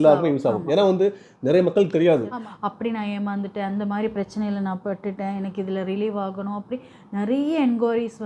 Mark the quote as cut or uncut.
cut